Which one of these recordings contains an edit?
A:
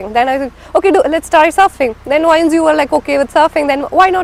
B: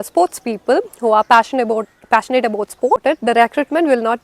B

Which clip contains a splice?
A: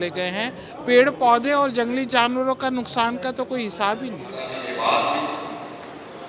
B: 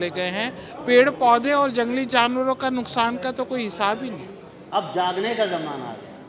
B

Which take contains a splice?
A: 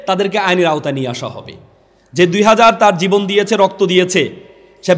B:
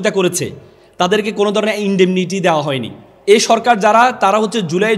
B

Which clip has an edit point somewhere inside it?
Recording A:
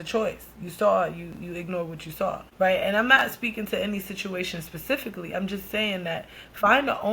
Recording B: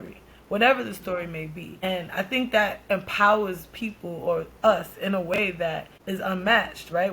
B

